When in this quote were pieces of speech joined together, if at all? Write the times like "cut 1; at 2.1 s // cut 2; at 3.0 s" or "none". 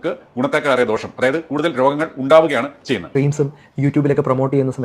cut 1; at 3.1 s